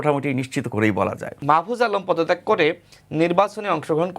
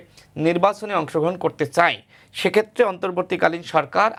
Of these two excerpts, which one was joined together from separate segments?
first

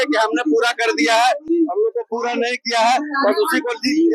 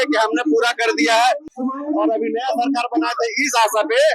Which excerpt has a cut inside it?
second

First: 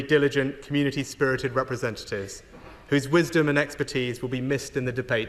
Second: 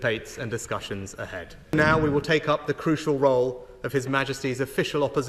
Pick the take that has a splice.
second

